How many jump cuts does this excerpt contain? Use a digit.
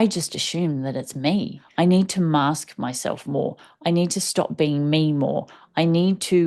1